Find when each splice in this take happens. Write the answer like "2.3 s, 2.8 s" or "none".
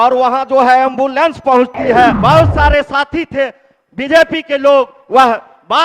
2.2 s